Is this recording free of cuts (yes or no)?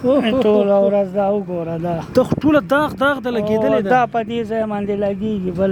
yes